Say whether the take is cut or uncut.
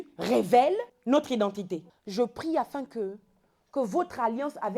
cut